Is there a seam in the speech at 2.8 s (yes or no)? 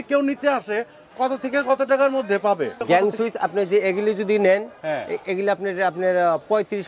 yes